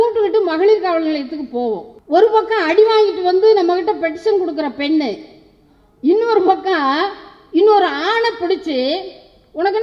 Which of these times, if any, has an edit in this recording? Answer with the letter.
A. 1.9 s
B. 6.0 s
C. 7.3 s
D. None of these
A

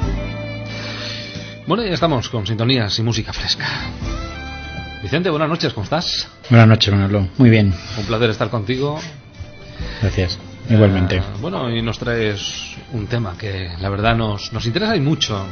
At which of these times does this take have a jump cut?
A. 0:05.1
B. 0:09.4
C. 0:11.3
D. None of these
A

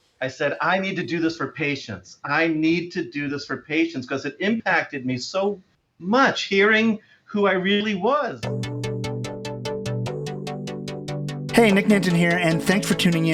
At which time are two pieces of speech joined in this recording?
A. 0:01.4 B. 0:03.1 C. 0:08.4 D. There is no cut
C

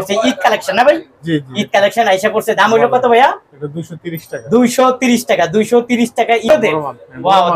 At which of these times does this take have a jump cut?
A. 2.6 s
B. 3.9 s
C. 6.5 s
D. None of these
C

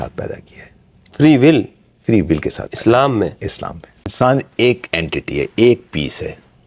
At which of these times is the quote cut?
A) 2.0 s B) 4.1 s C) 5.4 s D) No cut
B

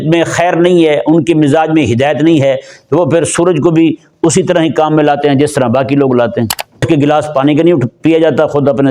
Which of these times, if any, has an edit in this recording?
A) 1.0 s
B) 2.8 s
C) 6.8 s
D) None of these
C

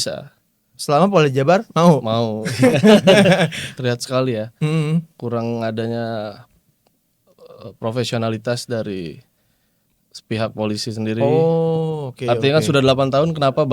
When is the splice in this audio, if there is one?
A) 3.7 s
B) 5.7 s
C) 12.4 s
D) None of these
A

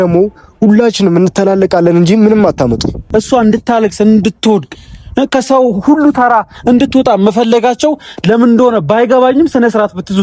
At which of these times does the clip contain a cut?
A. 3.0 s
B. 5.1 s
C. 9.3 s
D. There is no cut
A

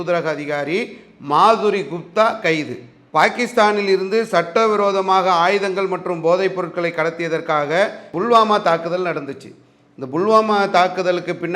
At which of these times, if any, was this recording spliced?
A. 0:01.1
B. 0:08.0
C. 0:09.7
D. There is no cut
B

